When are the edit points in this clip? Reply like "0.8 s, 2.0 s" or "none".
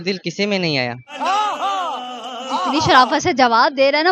none